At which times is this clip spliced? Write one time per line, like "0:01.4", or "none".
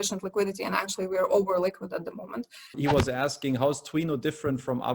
0:02.8